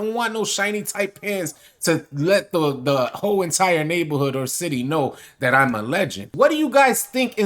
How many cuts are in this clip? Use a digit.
1